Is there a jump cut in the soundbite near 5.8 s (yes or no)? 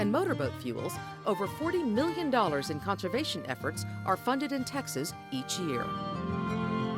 yes